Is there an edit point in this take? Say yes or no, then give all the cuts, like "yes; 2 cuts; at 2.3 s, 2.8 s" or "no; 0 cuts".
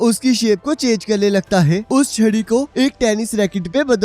yes; 1 cut; at 1.8 s